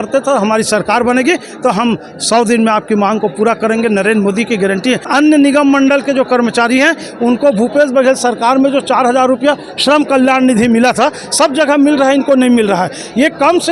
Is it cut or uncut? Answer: cut